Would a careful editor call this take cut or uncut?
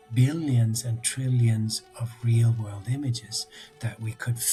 uncut